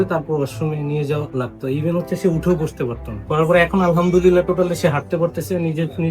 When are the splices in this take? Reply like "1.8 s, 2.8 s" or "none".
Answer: 3.2 s